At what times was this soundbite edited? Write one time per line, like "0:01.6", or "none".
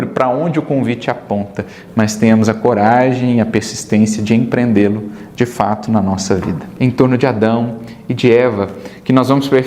0:06.6